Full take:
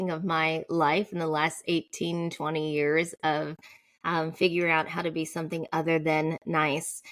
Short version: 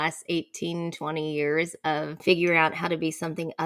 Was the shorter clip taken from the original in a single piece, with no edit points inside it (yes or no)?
no